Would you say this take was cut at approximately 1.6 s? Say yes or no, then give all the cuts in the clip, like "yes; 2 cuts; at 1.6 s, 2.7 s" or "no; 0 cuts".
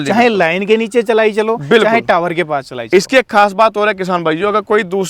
no; 0 cuts